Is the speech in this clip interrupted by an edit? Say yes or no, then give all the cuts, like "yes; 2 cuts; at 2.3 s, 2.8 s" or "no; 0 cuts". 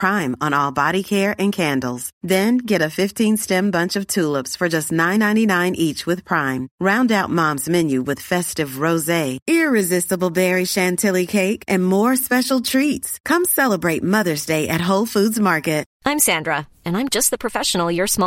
yes; 1 cut; at 15.9 s